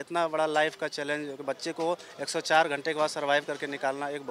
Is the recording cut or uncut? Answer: uncut